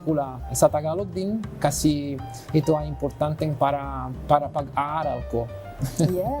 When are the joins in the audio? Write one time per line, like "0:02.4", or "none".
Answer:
none